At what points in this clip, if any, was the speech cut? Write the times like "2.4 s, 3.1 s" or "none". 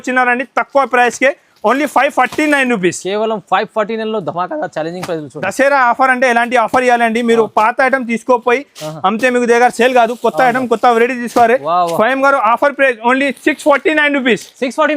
5.4 s